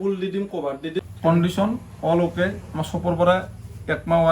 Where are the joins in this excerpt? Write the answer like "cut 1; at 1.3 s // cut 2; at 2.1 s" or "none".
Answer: cut 1; at 1.0 s